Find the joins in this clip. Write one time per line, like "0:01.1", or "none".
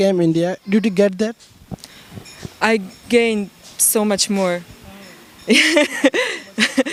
none